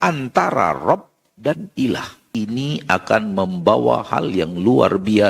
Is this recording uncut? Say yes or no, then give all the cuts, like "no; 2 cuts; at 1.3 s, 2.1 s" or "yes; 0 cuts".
no; 1 cut; at 2.2 s